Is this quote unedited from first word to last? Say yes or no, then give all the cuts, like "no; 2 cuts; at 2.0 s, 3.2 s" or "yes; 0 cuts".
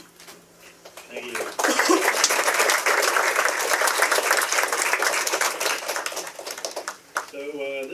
no; 1 cut; at 3.4 s